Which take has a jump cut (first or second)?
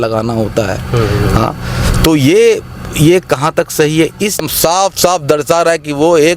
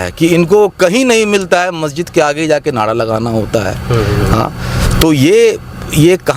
first